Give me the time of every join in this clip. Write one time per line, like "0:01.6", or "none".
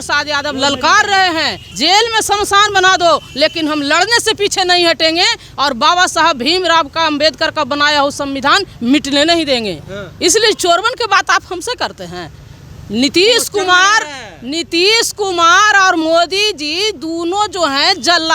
0:01.6